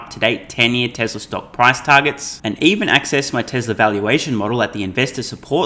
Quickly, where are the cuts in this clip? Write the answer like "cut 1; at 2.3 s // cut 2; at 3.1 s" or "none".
none